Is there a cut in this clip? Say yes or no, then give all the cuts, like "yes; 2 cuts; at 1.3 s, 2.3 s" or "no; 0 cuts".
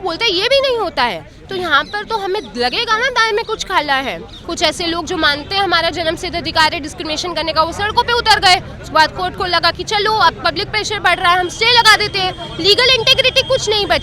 yes; 1 cut; at 4.4 s